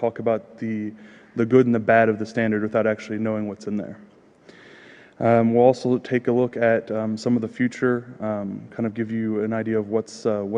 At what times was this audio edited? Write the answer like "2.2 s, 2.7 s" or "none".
none